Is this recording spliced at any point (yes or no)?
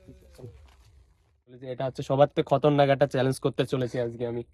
yes